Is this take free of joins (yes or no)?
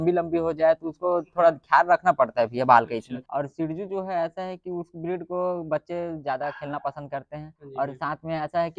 no